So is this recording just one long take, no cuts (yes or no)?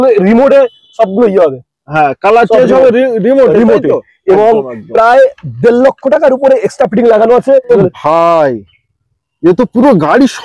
no